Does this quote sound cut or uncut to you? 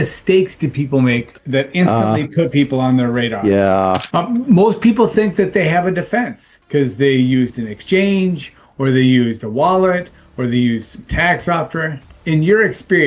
cut